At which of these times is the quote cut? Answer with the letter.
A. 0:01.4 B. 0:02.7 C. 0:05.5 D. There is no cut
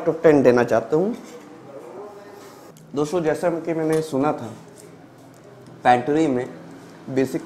B